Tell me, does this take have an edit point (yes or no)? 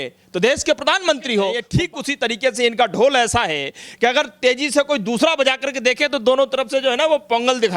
yes